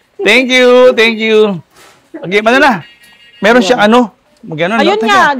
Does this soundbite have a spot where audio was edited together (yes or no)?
no